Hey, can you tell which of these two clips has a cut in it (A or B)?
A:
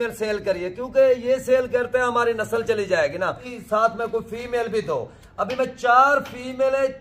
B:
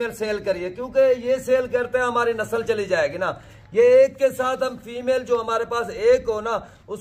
A